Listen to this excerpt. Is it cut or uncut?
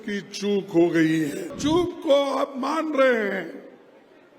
cut